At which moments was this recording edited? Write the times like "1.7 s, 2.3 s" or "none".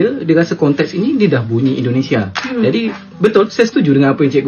none